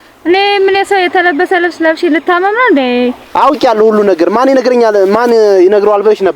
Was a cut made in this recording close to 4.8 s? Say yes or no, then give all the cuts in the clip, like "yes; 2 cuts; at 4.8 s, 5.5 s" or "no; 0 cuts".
no; 1 cut; at 3.2 s